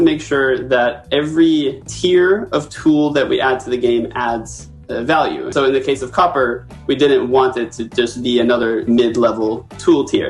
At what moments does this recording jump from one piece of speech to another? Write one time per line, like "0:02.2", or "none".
0:01.9
0:05.5
0:08.8